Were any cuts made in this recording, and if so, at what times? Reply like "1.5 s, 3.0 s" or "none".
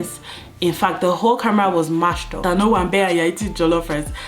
2.4 s